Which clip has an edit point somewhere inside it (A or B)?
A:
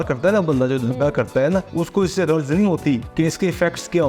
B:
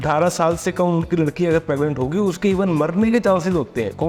A